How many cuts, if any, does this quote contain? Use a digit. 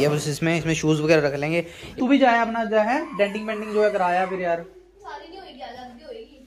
1